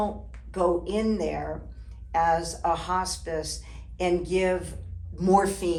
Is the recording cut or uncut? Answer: uncut